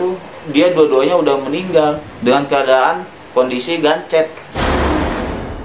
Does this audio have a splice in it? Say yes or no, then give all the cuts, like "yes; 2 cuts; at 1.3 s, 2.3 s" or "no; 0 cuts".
yes; 2 cuts; at 2.0 s, 4.6 s